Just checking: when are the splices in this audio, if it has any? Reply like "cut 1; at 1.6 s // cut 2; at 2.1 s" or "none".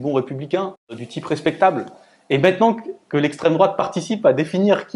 cut 1; at 1.0 s

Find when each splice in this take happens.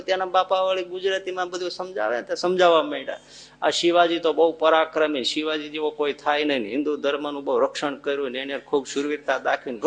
none

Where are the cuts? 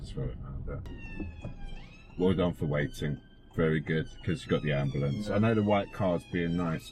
cut 1; at 0.9 s

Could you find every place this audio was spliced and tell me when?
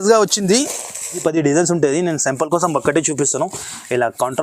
cut 1; at 1.2 s

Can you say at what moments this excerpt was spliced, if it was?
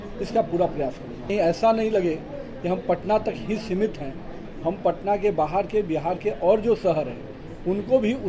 cut 1; at 1.3 s

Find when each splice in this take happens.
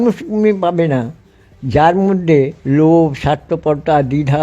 cut 1; at 2.6 s

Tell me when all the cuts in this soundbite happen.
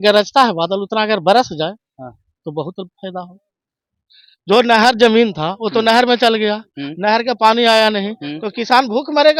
none

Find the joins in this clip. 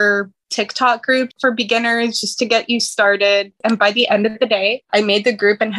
cut 1; at 1.4 s

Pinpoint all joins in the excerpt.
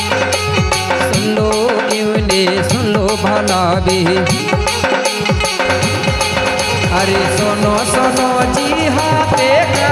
none

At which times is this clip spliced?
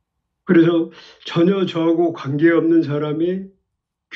none

